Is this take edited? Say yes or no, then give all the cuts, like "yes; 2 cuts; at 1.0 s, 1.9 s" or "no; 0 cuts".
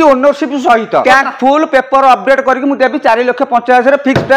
yes; 1 cut; at 1.0 s